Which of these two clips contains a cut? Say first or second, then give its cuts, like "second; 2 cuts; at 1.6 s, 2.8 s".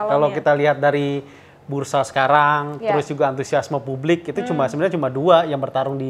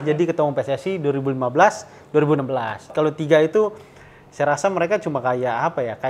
second; 1 cut; at 2.9 s